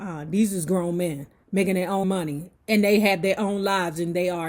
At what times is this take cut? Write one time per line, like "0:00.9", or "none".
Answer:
0:02.0